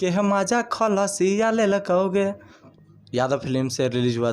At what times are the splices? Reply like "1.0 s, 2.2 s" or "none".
2.7 s